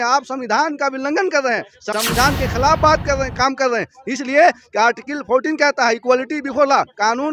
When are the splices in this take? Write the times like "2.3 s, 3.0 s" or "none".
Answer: none